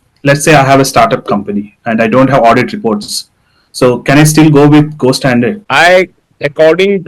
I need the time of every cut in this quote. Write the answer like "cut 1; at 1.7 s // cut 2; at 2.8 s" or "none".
cut 1; at 5.6 s

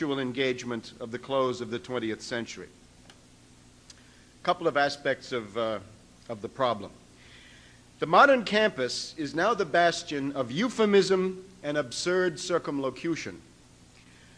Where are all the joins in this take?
none

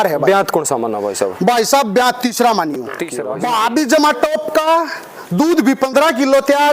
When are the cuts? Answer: cut 1; at 3.1 s

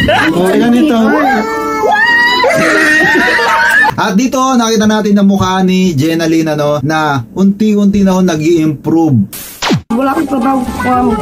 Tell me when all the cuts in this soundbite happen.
cut 1; at 6.8 s // cut 2; at 9.7 s

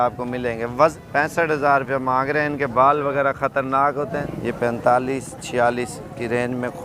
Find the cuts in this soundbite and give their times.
cut 1; at 0.9 s // cut 2; at 4.2 s

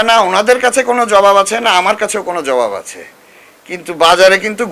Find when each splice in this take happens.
none

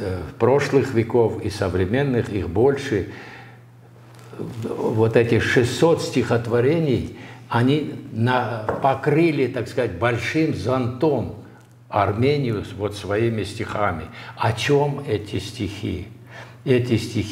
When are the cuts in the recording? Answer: none

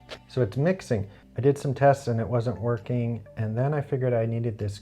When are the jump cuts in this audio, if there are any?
cut 1; at 1.2 s

